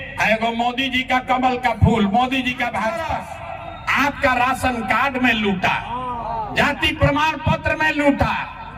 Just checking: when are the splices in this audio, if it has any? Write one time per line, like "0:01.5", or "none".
0:03.2